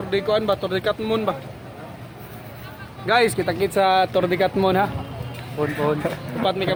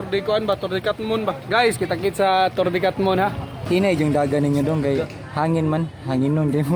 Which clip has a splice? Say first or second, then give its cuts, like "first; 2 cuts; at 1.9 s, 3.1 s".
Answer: second; 2 cuts; at 1.4 s, 3.6 s